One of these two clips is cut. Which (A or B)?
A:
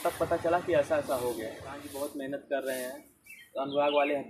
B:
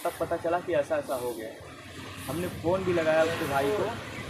A